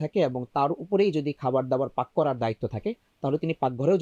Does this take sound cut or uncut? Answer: uncut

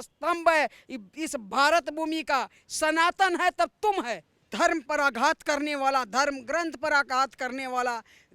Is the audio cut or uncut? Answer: cut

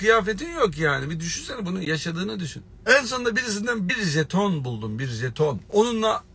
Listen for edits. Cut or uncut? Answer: uncut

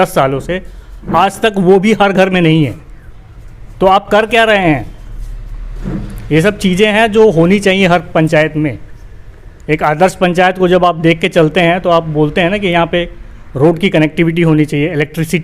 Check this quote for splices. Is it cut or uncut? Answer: uncut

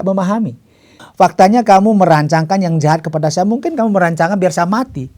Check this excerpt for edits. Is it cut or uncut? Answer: cut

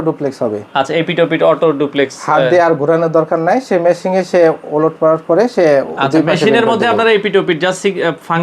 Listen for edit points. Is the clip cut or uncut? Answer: uncut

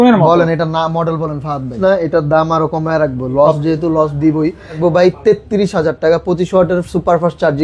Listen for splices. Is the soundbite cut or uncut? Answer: cut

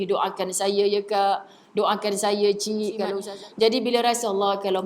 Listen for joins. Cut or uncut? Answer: cut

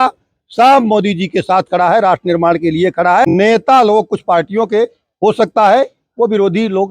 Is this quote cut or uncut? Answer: cut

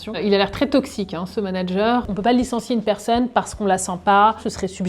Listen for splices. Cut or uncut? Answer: uncut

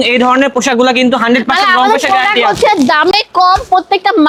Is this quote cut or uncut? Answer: uncut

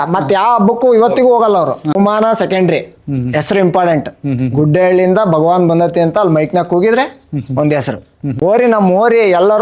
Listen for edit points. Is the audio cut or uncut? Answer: cut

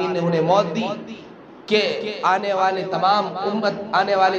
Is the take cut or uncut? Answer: uncut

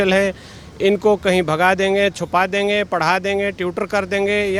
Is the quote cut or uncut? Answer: uncut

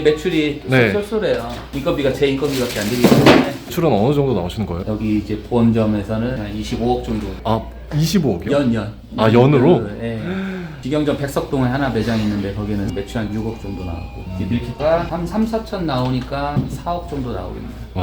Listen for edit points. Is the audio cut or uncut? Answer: cut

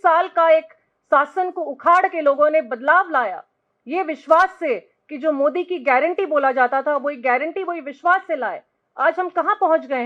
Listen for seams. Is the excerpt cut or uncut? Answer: uncut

